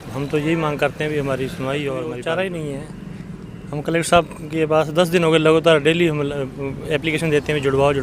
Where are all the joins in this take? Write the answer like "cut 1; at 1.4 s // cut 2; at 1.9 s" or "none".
cut 1; at 2.1 s